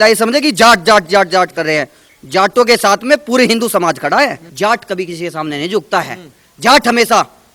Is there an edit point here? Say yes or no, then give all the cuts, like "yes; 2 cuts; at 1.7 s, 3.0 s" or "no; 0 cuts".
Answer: yes; 1 cut; at 4.4 s